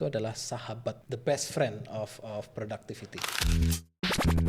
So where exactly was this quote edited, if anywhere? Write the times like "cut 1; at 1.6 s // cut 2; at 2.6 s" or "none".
cut 1; at 1.0 s // cut 2; at 2.7 s

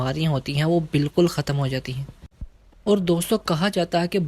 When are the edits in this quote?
none

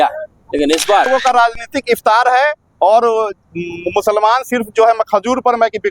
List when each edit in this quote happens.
cut 1; at 1.1 s

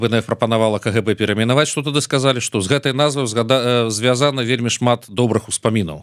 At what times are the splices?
none

